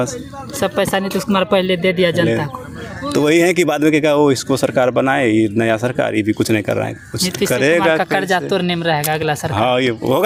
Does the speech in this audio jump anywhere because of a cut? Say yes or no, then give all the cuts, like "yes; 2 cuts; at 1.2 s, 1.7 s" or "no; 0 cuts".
no; 0 cuts